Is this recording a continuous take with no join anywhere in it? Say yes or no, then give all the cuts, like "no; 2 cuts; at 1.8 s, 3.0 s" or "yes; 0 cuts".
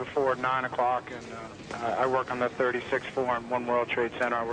no; 1 cut; at 2.8 s